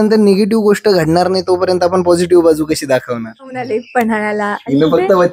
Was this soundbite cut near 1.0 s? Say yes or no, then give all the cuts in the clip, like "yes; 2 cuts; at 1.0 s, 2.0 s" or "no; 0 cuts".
no; 1 cut; at 3.6 s